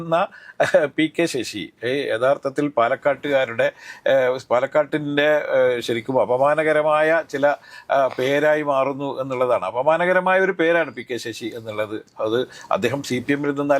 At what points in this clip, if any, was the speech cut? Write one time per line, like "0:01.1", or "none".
none